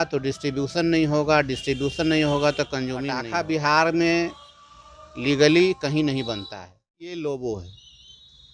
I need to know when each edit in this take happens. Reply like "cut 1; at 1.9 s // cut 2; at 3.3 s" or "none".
cut 1; at 3.3 s // cut 2; at 7.0 s